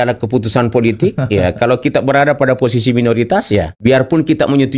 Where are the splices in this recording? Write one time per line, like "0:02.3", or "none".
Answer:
0:03.7